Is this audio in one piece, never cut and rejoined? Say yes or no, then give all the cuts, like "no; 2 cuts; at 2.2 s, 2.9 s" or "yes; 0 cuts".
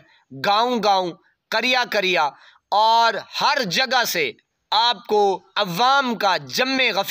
no; 1 cut; at 5.5 s